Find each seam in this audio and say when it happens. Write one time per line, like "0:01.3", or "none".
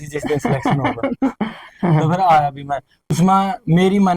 0:03.1